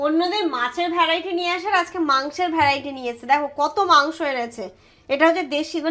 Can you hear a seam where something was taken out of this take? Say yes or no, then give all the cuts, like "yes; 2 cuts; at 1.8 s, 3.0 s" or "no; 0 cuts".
no; 0 cuts